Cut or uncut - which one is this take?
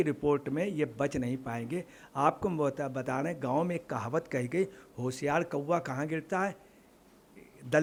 uncut